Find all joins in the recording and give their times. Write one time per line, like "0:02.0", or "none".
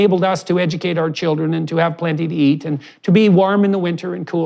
none